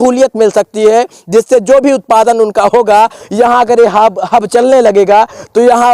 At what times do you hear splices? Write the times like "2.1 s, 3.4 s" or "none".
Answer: none